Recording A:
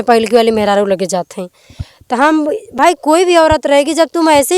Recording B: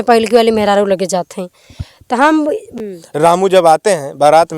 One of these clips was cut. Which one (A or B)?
B